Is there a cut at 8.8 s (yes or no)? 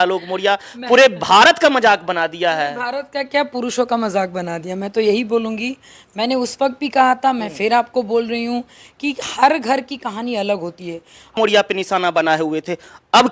no